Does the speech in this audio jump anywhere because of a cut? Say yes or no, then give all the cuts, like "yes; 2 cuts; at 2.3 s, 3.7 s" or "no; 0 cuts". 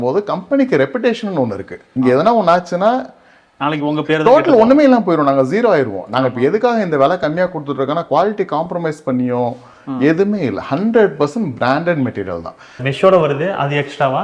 yes; 2 cuts; at 1.9 s, 12.8 s